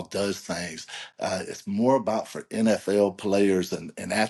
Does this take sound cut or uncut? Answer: uncut